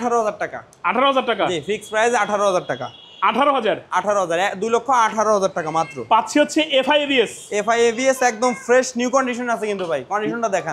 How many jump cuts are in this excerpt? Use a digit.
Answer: 0